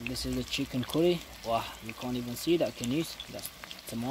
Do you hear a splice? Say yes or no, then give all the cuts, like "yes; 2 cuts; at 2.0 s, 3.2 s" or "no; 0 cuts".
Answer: no; 0 cuts